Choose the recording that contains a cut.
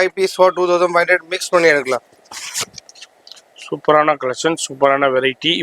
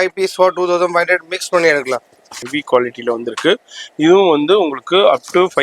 second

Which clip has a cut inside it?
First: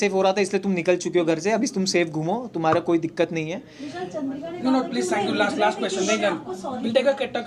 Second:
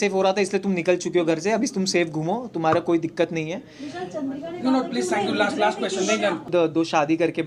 second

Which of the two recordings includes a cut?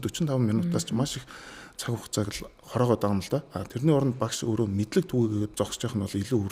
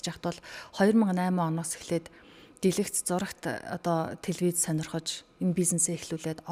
first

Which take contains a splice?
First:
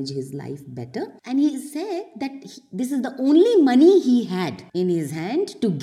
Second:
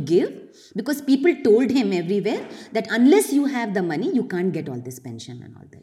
first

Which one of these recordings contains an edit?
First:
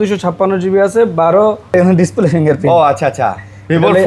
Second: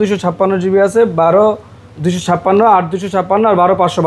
first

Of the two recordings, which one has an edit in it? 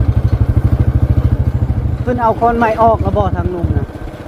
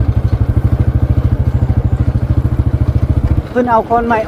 first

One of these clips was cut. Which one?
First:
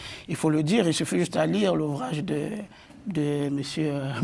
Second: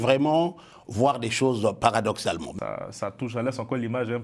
second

